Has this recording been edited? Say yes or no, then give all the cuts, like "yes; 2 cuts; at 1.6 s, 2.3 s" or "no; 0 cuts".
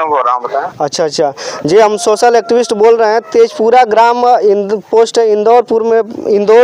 no; 0 cuts